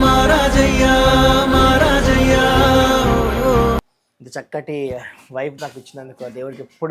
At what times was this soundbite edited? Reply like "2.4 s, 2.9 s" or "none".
3.9 s